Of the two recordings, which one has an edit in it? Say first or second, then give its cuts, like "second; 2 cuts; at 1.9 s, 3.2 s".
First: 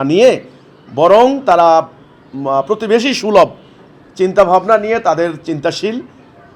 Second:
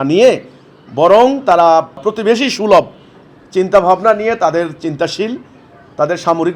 second; 1 cut; at 2.0 s